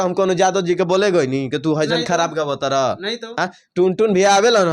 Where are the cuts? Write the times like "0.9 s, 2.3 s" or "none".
none